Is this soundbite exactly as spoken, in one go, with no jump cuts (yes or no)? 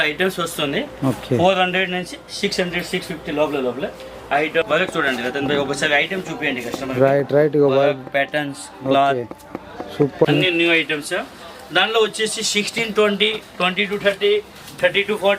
no